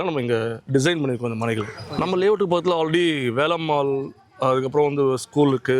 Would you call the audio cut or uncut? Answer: cut